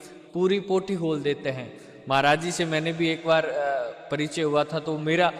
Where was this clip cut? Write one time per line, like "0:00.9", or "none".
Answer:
none